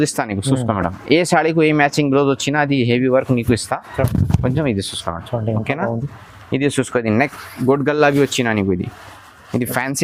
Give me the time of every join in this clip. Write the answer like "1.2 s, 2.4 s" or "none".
none